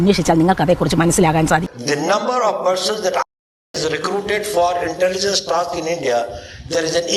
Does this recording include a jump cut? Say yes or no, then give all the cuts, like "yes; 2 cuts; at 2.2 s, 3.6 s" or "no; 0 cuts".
yes; 1 cut; at 1.7 s